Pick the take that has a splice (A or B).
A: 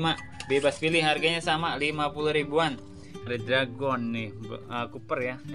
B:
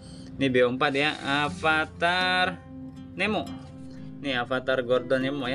A